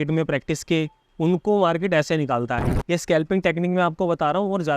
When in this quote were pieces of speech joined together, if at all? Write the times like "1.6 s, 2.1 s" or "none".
2.7 s